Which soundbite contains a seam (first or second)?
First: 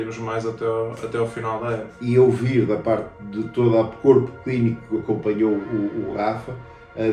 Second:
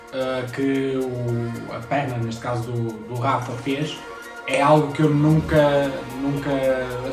first